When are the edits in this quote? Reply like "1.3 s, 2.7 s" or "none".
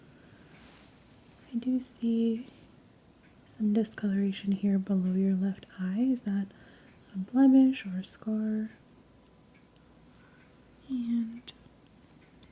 8.8 s